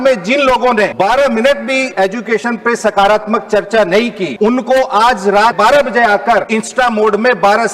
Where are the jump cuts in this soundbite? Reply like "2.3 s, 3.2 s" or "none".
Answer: 0.9 s, 1.9 s, 4.2 s, 5.6 s, 6.5 s

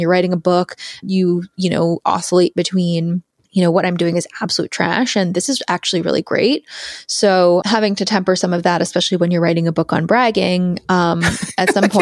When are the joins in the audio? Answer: 1.0 s, 3.3 s, 7.6 s

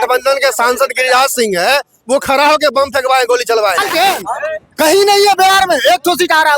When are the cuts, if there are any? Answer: 3.8 s

